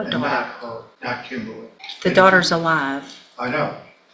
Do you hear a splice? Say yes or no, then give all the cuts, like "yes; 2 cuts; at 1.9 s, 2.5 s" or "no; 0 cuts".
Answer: yes; 2 cuts; at 0.9 s, 1.8 s